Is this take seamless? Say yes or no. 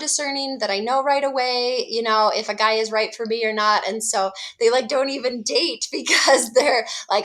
yes